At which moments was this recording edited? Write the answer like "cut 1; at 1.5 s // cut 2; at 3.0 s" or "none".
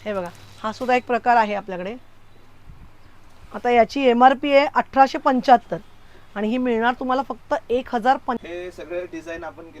cut 1; at 8.4 s